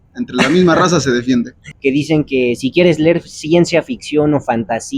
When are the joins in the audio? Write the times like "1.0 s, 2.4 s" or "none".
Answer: 1.6 s

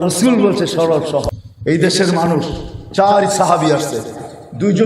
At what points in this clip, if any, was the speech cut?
1.4 s

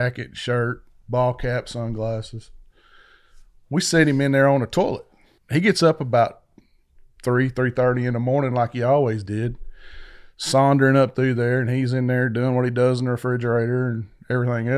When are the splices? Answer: 5.4 s

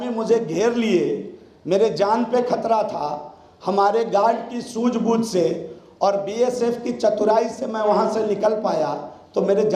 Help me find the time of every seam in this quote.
none

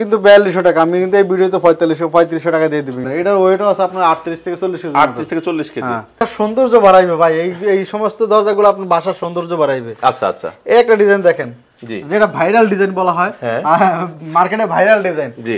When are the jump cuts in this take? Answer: 3.0 s, 6.2 s

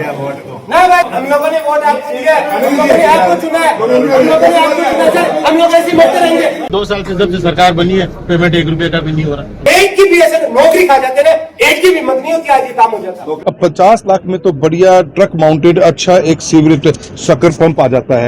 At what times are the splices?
1.1 s, 6.7 s, 9.7 s, 13.3 s

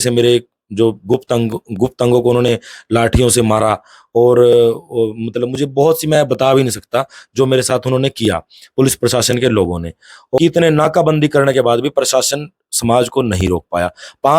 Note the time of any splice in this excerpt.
10.4 s

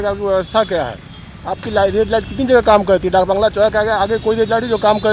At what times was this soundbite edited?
none

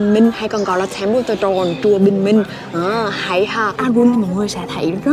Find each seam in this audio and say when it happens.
3.8 s

